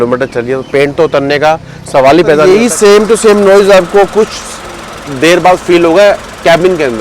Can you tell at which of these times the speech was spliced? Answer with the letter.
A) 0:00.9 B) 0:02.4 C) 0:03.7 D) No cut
B